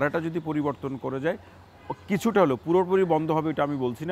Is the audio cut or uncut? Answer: uncut